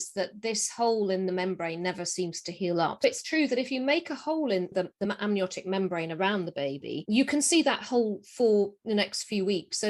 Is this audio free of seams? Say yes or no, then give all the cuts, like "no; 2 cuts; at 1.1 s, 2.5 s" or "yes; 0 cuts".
no; 2 cuts; at 3.0 s, 4.7 s